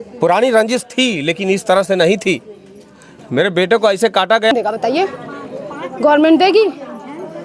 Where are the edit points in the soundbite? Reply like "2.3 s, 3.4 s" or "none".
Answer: 4.5 s